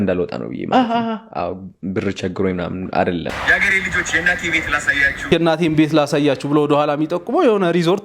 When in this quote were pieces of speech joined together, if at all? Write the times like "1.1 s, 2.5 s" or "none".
3.3 s, 5.2 s

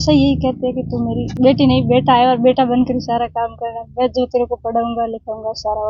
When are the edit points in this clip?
1.2 s

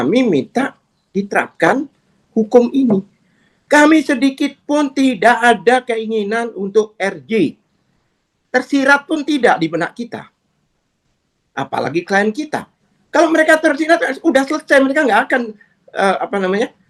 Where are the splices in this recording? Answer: none

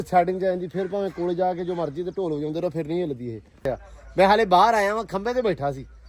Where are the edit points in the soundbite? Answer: 3.7 s

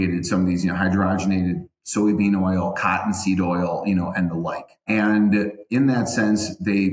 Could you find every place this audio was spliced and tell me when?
4.8 s

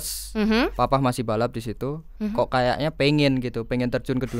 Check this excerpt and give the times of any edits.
2.2 s

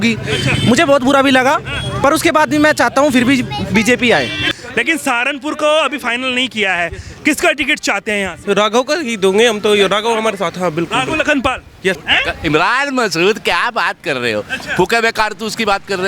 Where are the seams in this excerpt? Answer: 4.4 s, 12.1 s

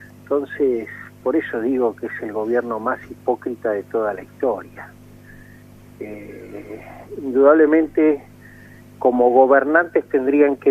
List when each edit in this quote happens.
9.0 s

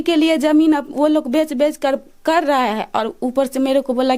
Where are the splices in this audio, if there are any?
none

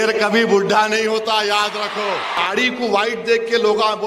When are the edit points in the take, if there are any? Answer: 2.4 s

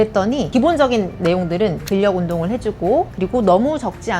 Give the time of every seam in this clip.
1.8 s

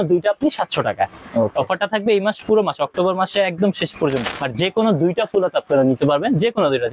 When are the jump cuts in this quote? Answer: 4.2 s

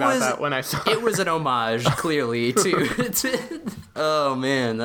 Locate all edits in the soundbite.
3.8 s

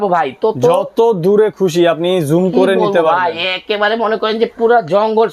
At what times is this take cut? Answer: none

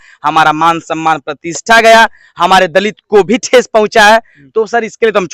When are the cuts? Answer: none

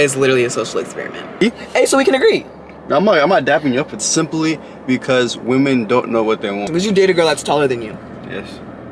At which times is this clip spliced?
1.4 s, 4.1 s, 6.7 s

